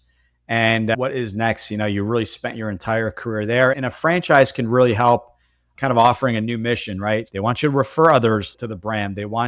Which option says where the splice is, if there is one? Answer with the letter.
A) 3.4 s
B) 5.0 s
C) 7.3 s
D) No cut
C